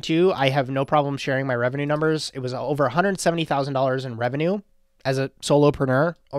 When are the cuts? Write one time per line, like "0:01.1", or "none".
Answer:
none